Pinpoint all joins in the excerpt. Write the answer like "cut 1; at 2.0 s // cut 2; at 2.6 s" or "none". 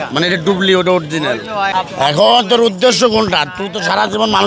cut 1; at 1.7 s